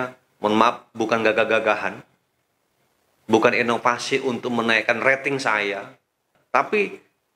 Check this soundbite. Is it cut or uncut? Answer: cut